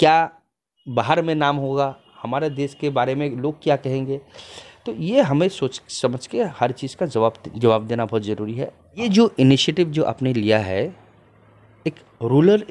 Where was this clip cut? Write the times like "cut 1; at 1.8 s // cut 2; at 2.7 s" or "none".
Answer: cut 1; at 9.0 s

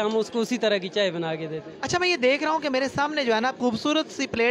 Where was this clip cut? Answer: none

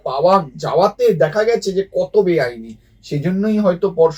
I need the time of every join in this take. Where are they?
none

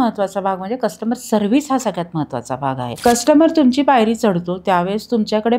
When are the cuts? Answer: cut 1; at 2.9 s

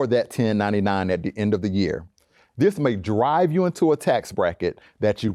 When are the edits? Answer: none

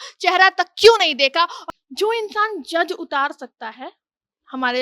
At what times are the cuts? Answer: cut 1; at 1.6 s

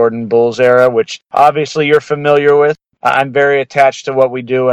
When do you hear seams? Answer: cut 1; at 1.2 s // cut 2; at 2.8 s

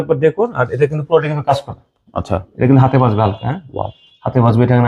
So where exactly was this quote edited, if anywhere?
none

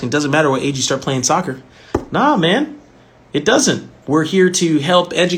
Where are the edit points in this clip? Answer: cut 1; at 3.9 s

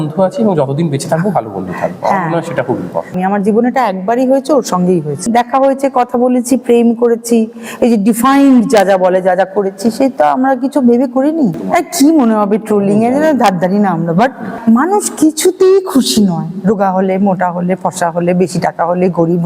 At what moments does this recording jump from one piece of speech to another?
cut 1; at 3.1 s // cut 2; at 5.3 s // cut 3; at 11.6 s // cut 4; at 14.5 s

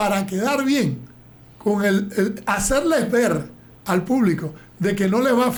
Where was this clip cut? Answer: none

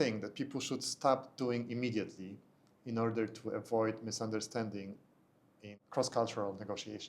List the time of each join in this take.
cut 1; at 5.8 s

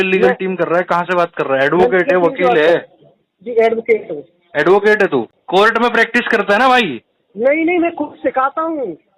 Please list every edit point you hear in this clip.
cut 1; at 5.4 s

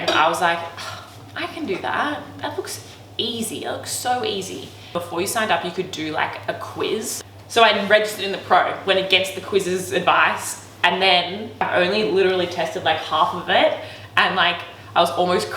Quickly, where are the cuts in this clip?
cut 1; at 4.9 s // cut 2; at 7.2 s // cut 3; at 11.6 s

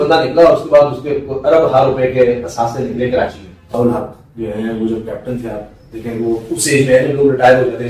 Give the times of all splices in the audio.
cut 1; at 3.6 s

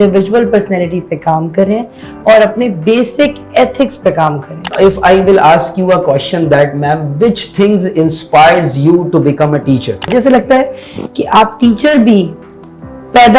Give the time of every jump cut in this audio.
cut 1; at 4.7 s // cut 2; at 10.1 s

